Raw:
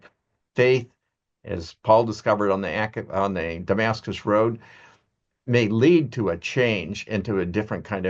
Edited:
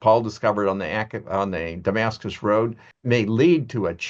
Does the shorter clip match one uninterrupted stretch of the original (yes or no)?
no